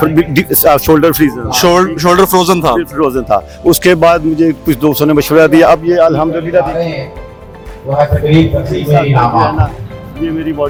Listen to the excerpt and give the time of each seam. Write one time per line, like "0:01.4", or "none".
none